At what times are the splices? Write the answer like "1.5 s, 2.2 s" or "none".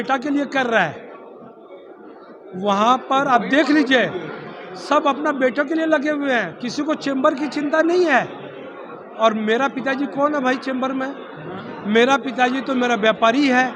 none